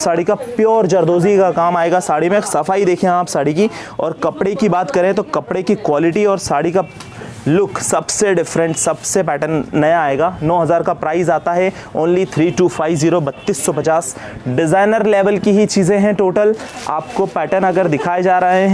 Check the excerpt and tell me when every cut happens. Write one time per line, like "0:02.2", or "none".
none